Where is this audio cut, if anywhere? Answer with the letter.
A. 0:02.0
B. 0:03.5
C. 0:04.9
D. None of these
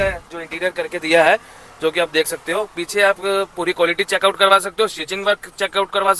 D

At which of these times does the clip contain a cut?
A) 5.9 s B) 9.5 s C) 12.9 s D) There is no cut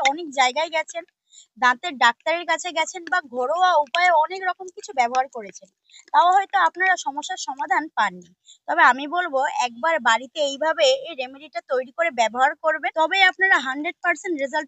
C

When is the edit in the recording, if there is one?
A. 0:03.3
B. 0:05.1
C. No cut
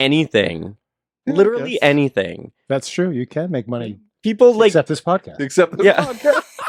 C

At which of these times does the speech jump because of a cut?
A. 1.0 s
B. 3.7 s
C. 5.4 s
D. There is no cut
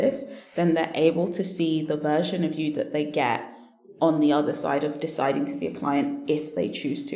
D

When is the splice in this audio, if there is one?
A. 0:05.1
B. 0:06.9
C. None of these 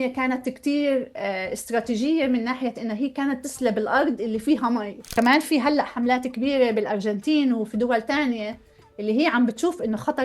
A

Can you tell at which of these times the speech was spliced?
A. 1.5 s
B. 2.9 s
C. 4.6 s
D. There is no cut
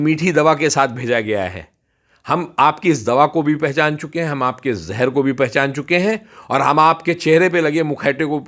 D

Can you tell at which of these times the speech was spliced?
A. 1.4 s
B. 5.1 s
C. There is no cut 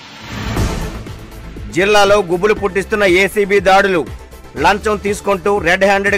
A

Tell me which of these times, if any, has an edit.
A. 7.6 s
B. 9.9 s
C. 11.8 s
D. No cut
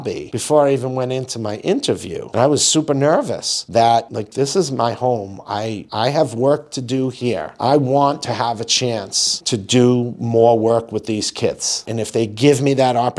C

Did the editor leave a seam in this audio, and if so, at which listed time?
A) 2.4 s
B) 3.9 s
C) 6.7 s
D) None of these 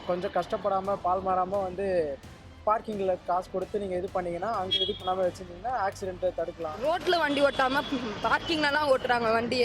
C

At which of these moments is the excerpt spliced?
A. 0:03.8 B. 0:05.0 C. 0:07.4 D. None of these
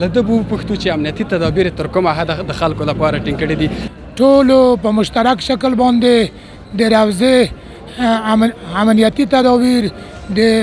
A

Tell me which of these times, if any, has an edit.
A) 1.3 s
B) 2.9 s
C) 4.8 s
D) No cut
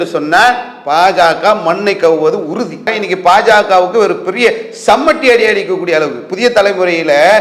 B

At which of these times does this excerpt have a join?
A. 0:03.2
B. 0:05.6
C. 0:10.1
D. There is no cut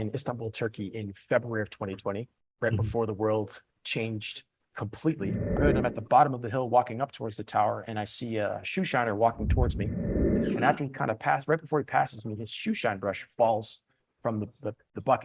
B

